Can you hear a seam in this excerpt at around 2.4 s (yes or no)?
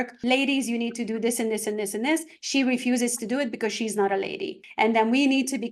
no